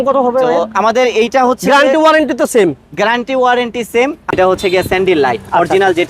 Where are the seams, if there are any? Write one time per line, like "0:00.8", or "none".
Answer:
0:04.3